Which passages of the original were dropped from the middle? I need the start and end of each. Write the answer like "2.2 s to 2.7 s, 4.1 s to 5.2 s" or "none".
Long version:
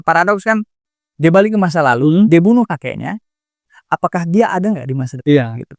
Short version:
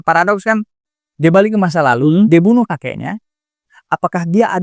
none